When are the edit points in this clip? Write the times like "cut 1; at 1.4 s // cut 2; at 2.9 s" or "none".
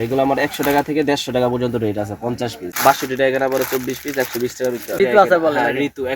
cut 1; at 2.6 s // cut 2; at 5.0 s